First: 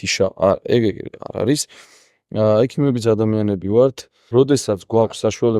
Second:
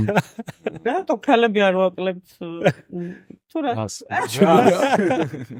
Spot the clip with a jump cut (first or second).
first